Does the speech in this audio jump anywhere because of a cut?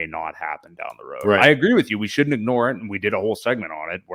no; 0 cuts

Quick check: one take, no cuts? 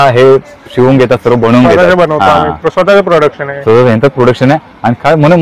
yes; 0 cuts

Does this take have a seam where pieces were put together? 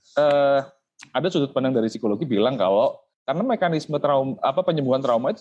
yes; 1 cut; at 3.1 s

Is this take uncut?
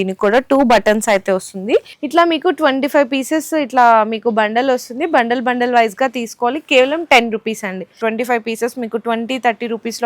no; 2 cuts; at 2.0 s, 7.9 s

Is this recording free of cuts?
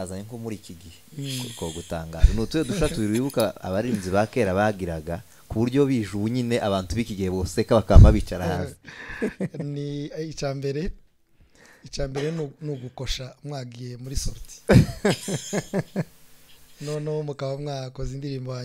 yes; 0 cuts

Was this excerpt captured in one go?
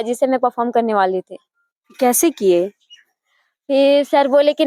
yes; 0 cuts

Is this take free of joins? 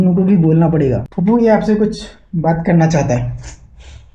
no; 1 cut; at 1.0 s

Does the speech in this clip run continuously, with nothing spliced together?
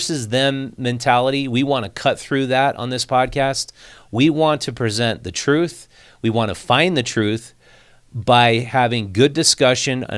yes; 0 cuts

